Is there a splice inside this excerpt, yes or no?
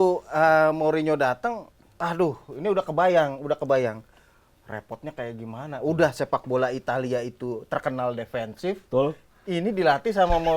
no